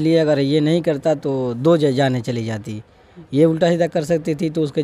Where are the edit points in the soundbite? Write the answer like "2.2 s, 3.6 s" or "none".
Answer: none